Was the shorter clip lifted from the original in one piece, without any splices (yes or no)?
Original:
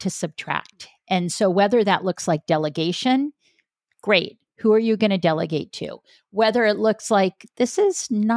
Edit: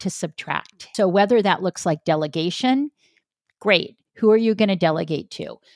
no